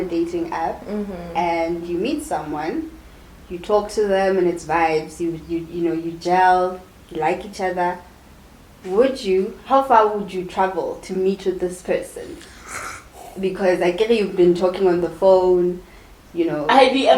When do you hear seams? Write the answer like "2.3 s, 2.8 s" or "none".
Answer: none